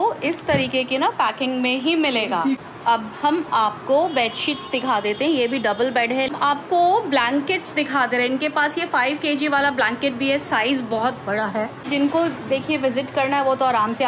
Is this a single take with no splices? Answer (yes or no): no